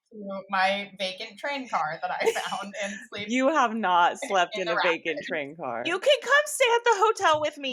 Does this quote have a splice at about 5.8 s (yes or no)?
no